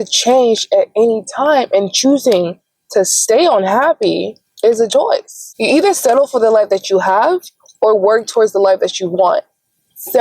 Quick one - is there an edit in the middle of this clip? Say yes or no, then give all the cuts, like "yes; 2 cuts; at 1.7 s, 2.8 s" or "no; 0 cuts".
yes; 1 cut; at 5.6 s